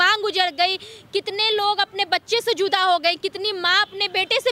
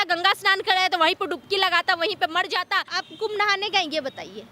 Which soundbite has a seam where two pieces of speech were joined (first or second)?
second